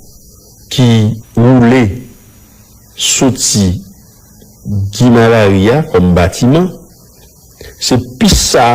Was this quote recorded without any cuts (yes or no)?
no